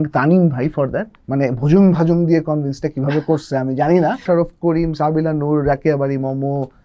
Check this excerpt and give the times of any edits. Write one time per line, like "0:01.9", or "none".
0:01.1
0:04.2